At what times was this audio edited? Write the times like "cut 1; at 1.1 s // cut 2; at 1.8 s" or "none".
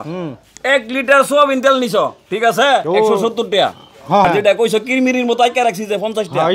cut 1; at 4.2 s